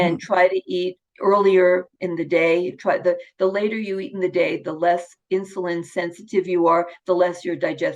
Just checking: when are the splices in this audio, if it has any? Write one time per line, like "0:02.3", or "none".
0:01.0